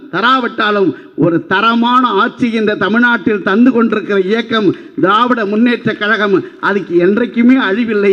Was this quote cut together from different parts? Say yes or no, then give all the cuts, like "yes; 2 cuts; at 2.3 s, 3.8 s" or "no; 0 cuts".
no; 0 cuts